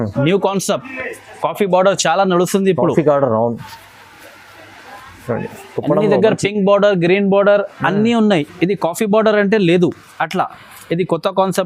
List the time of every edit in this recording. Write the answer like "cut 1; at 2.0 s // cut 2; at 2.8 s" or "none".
none

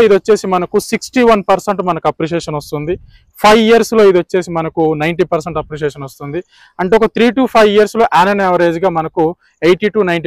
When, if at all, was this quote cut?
none

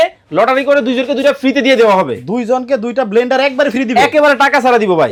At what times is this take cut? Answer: none

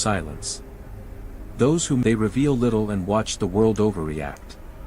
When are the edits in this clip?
cut 1; at 2.0 s

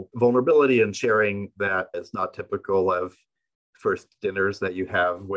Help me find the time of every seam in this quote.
none

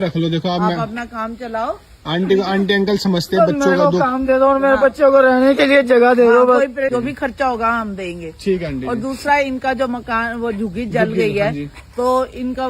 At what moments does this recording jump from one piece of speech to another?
cut 1; at 6.9 s

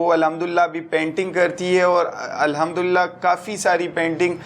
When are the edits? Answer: none

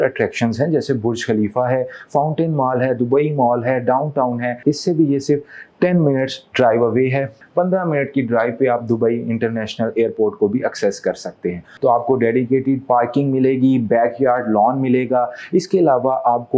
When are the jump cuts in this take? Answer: cut 1; at 7.4 s // cut 2; at 11.7 s

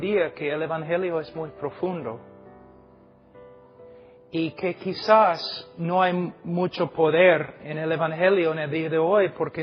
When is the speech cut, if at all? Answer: cut 1; at 2.2 s // cut 2; at 4.0 s

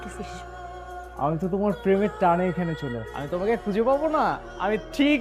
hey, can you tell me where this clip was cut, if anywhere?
none

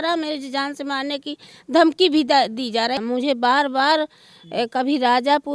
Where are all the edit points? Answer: cut 1; at 3.0 s

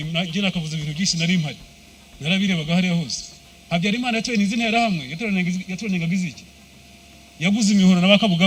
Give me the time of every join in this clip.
none

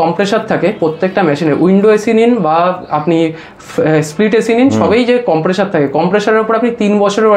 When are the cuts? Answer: none

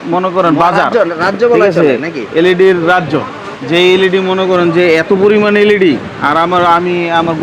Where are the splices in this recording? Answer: none

